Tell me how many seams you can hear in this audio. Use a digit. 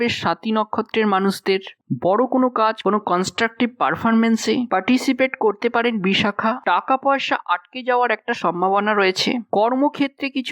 1